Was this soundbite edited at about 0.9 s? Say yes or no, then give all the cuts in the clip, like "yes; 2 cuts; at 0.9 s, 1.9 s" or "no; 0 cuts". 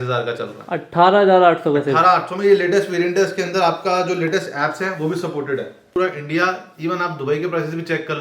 no; 1 cut; at 5.9 s